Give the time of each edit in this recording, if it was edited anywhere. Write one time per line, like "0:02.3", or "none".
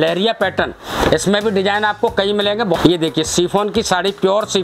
0:02.8